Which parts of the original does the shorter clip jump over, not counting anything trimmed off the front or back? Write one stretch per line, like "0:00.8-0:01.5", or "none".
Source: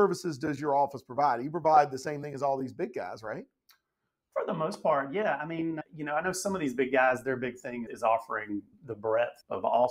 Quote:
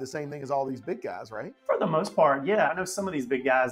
0:03.4-0:04.2
0:05.4-0:06.2

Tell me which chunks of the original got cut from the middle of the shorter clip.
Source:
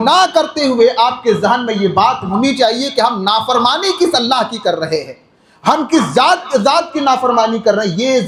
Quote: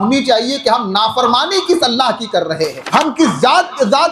0:05.1-0:05.5

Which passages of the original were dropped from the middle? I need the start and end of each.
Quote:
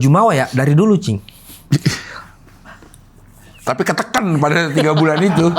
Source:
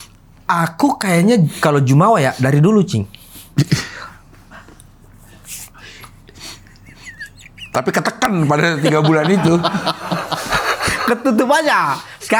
0:05.4-0:07.7

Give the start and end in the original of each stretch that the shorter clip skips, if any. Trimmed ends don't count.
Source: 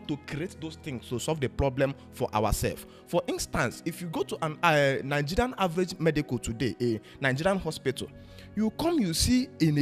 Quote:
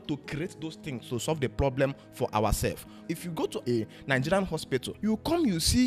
0:03.1-0:06.2
0:08.1-0:08.5

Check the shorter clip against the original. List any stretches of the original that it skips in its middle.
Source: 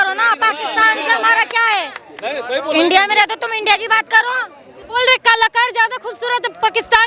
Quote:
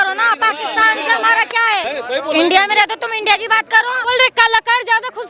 0:01.8-0:02.2
0:04.4-0:04.9

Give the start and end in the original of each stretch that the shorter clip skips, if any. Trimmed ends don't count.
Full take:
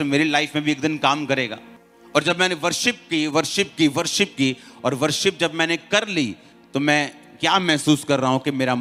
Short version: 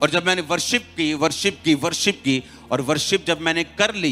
none

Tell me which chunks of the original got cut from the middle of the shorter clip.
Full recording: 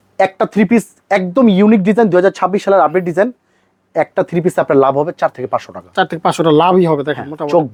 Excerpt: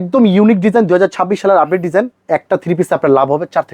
0:03.4-0:03.8

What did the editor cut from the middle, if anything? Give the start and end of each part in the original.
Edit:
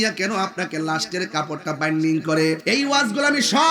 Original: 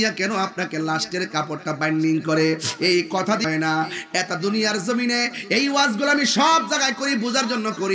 0:02.6-0:05.5

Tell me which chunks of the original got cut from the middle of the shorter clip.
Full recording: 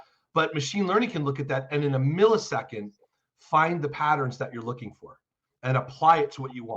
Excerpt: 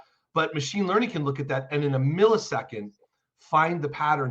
none

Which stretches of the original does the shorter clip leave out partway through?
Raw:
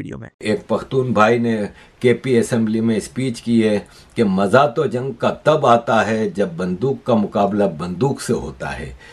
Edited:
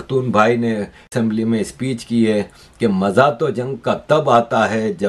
0:01.9-0:02.5

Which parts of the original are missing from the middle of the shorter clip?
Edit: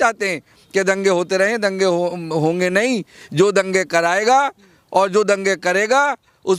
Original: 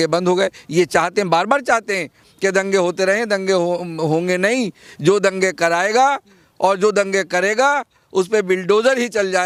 none

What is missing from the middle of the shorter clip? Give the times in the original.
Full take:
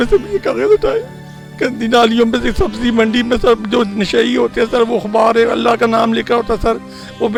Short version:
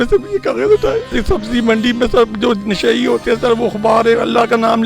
0:01.2-0:02.5

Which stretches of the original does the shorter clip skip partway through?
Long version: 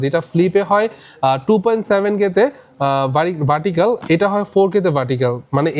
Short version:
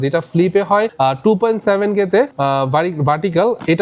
0:00.9-0:01.2
0:02.6-0:02.8

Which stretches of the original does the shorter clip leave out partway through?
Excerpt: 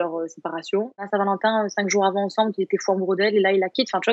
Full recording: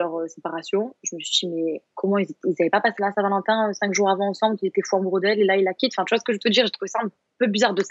0:01.1-0:03.1

